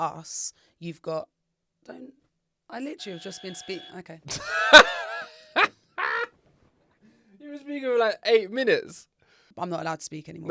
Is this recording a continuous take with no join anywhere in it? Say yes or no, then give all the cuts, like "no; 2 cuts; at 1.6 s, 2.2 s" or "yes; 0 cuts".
yes; 0 cuts